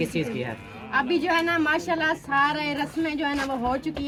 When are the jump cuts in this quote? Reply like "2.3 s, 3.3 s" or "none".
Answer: none